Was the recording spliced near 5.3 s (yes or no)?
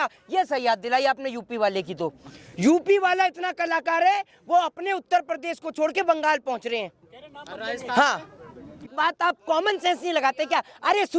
no